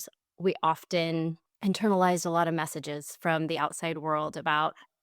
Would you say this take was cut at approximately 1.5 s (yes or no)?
yes